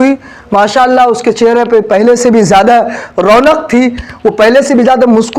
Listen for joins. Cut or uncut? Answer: uncut